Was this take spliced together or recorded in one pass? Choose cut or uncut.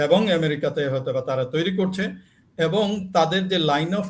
uncut